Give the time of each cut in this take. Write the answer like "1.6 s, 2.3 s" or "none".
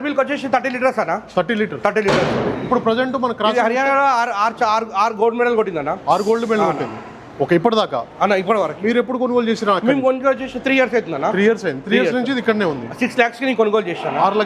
none